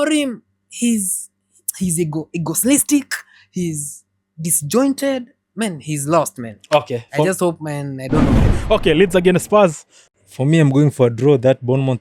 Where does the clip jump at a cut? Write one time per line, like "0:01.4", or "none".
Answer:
0:08.4